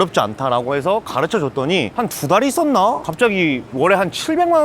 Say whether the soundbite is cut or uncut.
cut